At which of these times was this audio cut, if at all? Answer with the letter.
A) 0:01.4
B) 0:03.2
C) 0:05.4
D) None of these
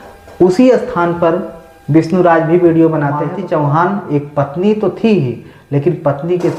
B